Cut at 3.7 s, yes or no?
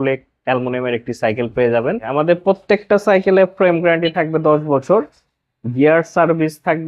no